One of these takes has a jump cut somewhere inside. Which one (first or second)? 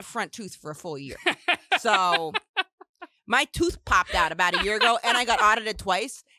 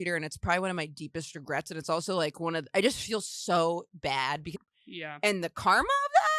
second